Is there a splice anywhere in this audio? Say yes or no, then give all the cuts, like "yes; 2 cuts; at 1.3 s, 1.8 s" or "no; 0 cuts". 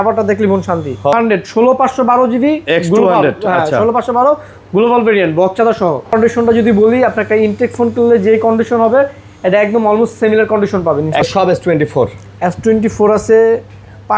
yes; 3 cuts; at 1.1 s, 6.1 s, 11.3 s